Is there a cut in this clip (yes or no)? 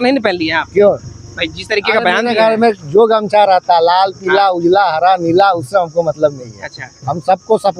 no